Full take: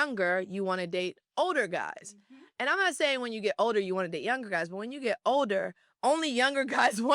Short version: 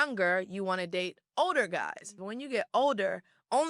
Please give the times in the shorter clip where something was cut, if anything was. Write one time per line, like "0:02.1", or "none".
0:02.3